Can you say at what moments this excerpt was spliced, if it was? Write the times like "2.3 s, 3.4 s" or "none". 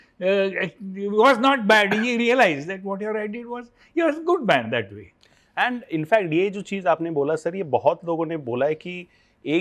none